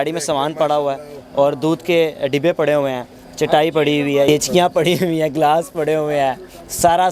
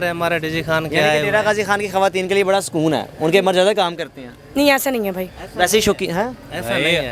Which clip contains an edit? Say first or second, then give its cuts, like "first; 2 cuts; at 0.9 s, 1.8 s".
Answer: first; 1 cut; at 4.3 s